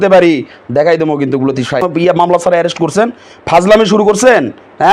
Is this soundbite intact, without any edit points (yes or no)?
no